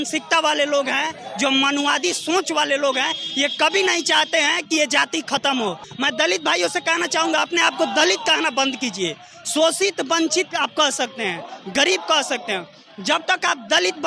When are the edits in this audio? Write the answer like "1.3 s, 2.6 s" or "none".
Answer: 5.9 s